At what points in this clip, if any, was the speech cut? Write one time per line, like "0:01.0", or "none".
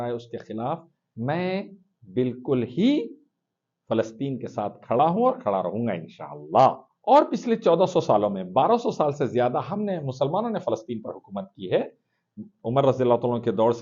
0:06.9